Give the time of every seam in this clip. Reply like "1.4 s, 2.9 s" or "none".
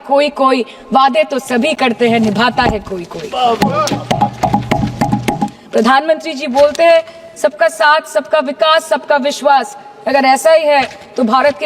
5.6 s